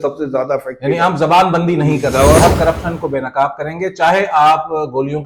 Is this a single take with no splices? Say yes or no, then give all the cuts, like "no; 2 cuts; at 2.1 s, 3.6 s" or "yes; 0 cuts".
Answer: no; 1 cut; at 2.4 s